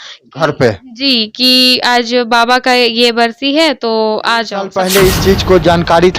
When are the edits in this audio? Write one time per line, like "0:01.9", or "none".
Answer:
0:04.7